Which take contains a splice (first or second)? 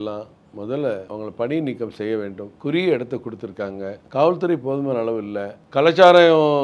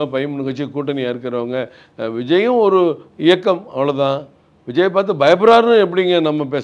first